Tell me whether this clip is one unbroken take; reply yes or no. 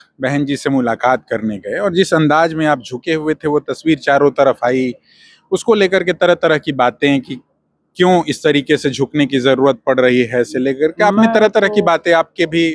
yes